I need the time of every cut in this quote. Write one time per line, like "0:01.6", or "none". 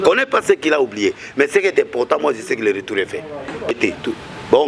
0:03.7